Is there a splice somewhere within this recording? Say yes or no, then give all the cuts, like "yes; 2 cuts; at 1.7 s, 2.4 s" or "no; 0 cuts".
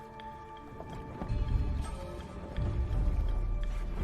yes; 1 cut; at 1.3 s